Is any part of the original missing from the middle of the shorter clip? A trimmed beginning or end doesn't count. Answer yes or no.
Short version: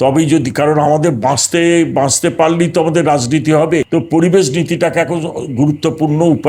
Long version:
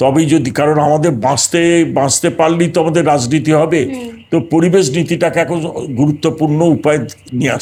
yes